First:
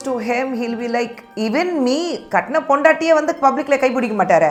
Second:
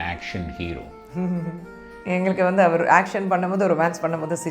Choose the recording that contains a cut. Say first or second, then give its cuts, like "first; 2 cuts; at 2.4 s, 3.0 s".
second; 1 cut; at 2.0 s